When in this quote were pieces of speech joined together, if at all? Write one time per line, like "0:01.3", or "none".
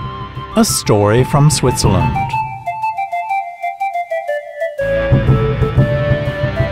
0:02.0